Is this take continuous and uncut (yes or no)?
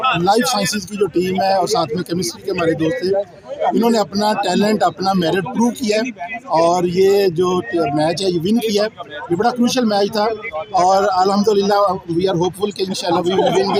yes